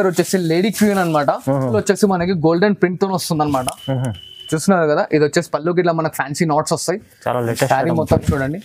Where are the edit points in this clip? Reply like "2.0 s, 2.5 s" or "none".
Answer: 1.8 s

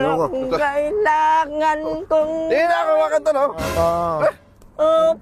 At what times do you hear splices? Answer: none

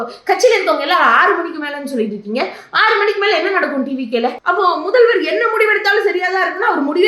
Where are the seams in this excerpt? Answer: 4.4 s

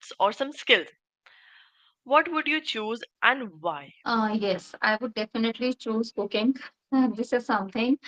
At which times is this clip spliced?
3.9 s

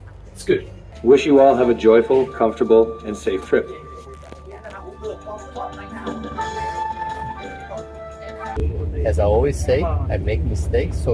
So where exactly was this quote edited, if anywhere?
0.9 s, 8.5 s

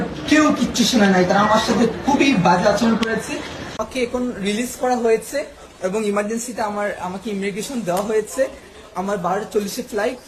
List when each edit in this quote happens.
3.8 s

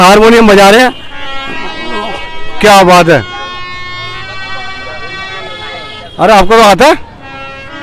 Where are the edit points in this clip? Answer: none

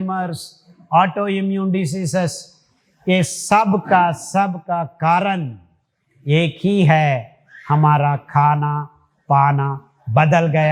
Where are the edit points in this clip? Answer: none

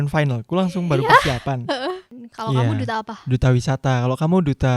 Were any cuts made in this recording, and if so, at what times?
2.2 s

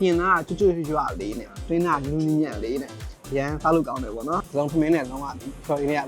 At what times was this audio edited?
4.4 s

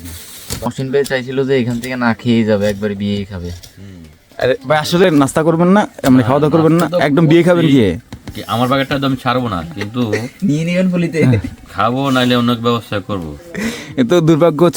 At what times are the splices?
0.7 s, 13.4 s

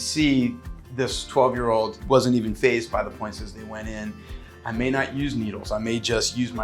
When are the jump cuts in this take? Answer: 2.0 s, 4.3 s

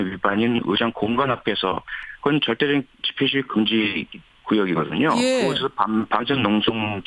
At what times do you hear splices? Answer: none

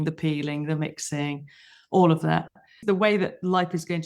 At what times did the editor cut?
2.8 s

